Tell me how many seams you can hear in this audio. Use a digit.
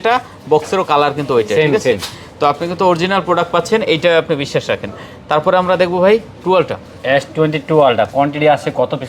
0